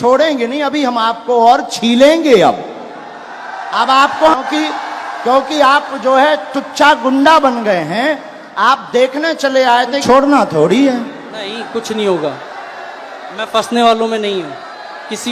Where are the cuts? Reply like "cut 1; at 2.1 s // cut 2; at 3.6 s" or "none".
cut 1; at 4.4 s // cut 2; at 10.0 s